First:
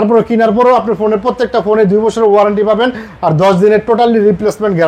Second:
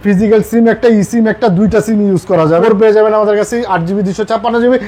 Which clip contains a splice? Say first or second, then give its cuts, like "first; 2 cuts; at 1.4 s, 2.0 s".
second; 1 cut; at 2.6 s